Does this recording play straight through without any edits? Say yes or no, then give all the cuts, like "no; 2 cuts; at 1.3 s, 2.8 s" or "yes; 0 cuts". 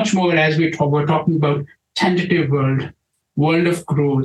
yes; 0 cuts